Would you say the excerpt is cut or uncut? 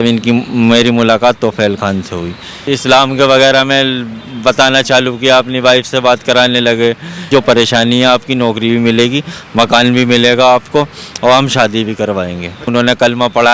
cut